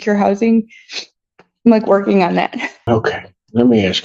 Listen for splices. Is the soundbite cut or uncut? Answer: cut